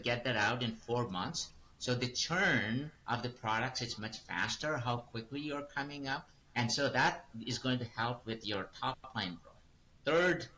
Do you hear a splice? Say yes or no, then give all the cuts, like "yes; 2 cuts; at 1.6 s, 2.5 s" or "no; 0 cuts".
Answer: yes; 2 cuts; at 2.9 s, 6.4 s